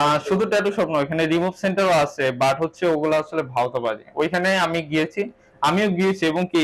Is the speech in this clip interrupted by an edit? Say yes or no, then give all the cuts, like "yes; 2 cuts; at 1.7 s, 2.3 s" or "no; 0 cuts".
no; 0 cuts